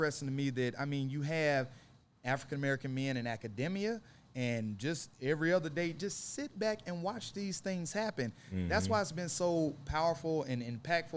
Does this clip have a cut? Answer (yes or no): no